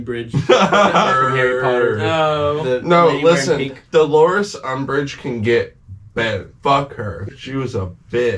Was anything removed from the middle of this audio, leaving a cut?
no; 0 cuts

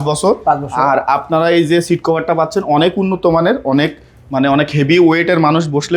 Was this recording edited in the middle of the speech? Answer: no; 0 cuts

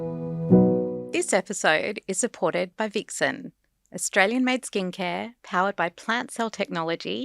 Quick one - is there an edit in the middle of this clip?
yes; 1 cut; at 1.0 s

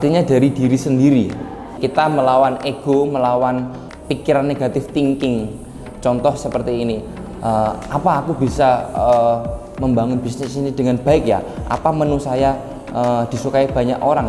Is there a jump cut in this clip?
yes; 2 cuts; at 1.8 s, 3.8 s

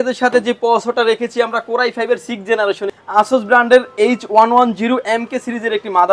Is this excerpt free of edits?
no; 1 cut; at 2.9 s

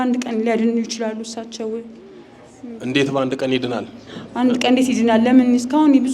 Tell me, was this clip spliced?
no; 0 cuts

